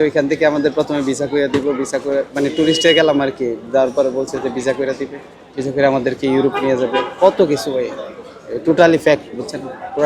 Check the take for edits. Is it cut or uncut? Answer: uncut